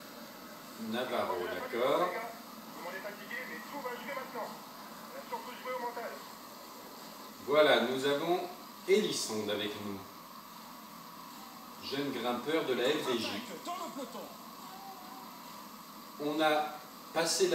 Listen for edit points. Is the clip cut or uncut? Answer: uncut